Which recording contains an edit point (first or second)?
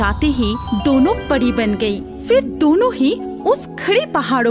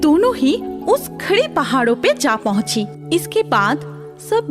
second